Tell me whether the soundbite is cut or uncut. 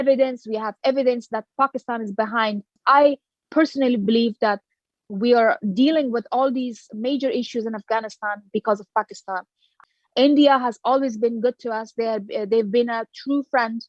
cut